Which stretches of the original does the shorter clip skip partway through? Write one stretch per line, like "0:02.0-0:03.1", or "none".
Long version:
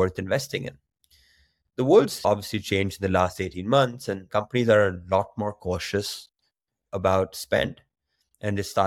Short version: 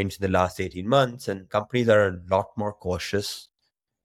none